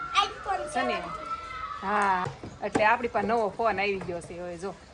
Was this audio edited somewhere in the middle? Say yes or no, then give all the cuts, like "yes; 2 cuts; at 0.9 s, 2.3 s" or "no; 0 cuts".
yes; 1 cut; at 2.2 s